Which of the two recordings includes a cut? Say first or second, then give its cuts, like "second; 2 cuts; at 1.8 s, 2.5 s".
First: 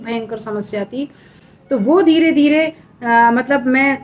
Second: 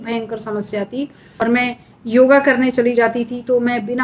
second; 1 cut; at 1.4 s